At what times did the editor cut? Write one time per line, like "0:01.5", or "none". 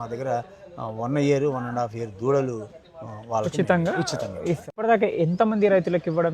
0:04.8